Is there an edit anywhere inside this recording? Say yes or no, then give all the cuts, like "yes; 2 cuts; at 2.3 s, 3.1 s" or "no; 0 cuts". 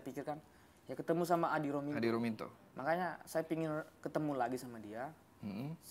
no; 0 cuts